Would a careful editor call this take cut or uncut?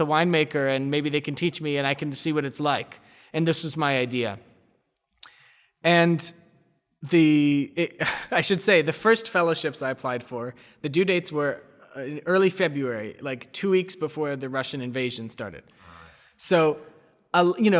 uncut